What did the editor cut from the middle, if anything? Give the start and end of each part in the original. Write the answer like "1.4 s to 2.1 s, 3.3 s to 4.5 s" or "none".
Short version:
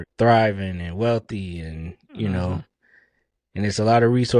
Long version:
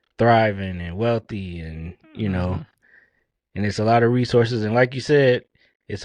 none